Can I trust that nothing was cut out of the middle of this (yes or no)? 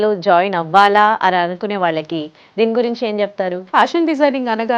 no